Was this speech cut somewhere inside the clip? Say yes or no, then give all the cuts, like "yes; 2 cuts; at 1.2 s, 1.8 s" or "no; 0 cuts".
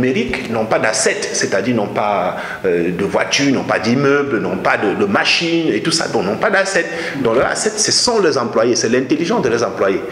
no; 0 cuts